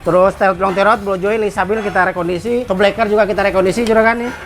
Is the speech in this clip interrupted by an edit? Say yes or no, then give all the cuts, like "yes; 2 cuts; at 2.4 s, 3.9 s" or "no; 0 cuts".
yes; 1 cut; at 2.7 s